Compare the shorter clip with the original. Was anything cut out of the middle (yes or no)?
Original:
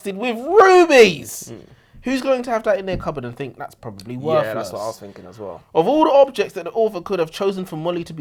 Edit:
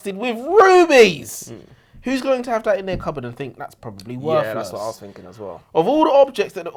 no